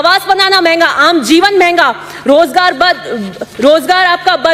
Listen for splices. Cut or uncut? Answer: uncut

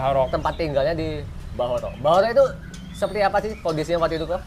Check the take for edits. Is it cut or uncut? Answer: uncut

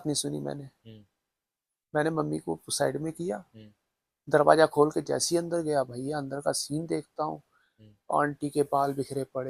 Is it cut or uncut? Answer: uncut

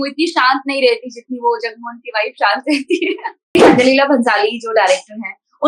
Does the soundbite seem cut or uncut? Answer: cut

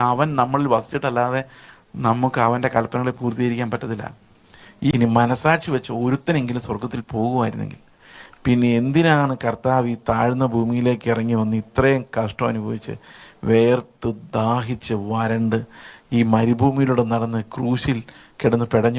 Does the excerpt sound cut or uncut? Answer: cut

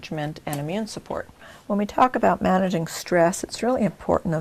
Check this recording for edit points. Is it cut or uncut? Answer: cut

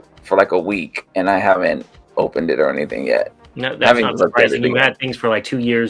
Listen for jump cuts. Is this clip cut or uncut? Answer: uncut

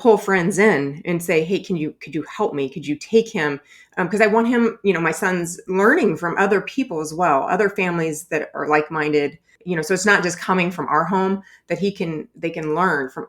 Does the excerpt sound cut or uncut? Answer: cut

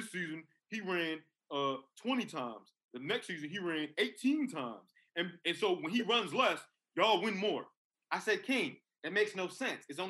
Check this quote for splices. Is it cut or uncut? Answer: uncut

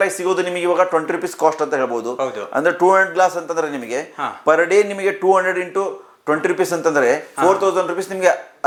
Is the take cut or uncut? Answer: uncut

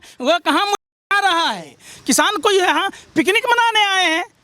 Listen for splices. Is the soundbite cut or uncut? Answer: cut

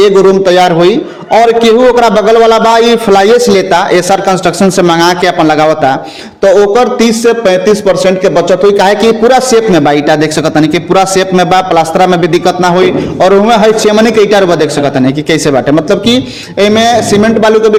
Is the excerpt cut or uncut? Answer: uncut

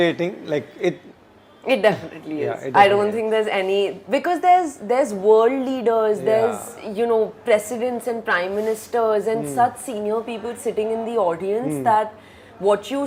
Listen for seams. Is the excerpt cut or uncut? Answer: uncut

